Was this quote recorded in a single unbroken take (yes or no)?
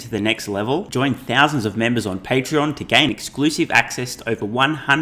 yes